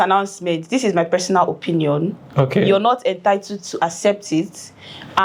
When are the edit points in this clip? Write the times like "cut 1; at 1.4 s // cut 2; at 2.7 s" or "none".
none